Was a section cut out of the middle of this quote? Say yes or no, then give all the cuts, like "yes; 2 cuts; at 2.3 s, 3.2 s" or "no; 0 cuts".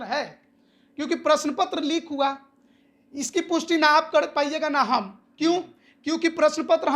no; 0 cuts